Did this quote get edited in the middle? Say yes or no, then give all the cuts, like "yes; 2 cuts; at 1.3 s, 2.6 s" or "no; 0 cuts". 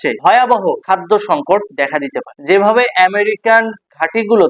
yes; 1 cut; at 2.3 s